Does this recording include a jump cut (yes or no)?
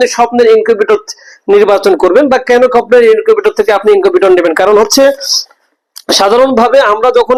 no